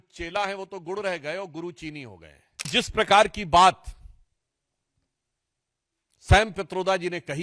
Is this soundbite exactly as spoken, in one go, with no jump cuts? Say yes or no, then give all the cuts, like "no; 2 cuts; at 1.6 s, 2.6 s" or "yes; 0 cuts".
no; 1 cut; at 2.7 s